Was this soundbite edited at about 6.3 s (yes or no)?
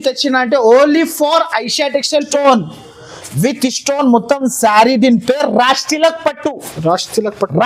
no